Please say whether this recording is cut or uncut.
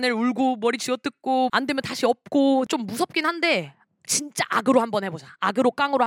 cut